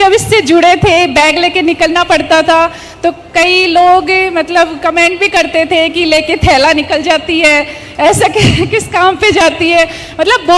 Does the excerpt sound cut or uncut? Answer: uncut